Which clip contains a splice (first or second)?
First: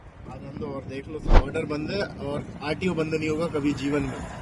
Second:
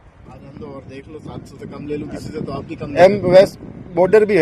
first